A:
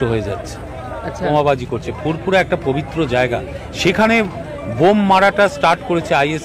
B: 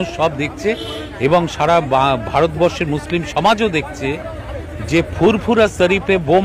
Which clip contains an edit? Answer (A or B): A